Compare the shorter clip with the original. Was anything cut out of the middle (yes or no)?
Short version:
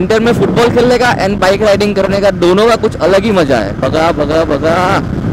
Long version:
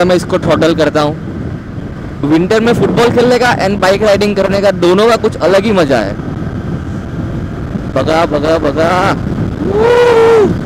yes